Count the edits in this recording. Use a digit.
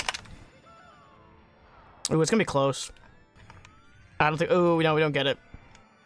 1